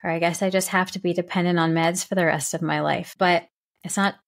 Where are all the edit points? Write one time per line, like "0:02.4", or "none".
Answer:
0:03.1